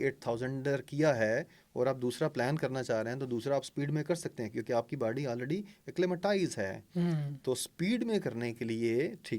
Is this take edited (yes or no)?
no